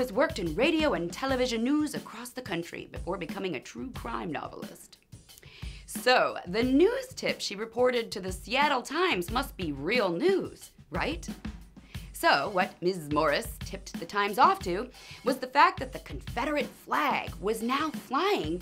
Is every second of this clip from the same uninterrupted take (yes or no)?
no